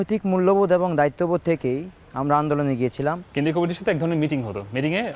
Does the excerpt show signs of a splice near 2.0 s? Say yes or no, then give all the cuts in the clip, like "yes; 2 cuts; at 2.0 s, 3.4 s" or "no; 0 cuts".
no; 1 cut; at 3.2 s